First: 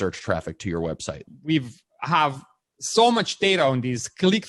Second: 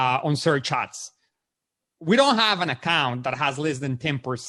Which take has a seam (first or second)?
first